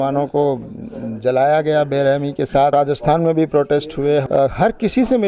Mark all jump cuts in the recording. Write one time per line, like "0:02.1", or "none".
0:02.7
0:04.3